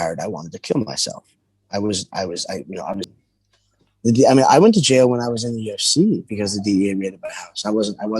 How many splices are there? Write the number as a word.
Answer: one